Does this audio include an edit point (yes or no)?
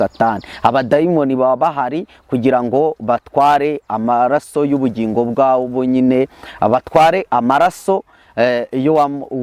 no